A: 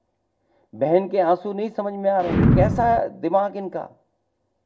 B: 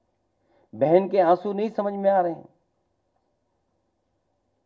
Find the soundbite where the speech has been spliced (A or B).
A